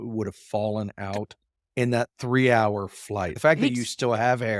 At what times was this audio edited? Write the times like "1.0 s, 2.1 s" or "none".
3.3 s